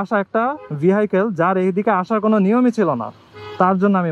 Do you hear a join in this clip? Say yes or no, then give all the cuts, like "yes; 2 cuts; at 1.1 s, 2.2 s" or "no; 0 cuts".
no; 0 cuts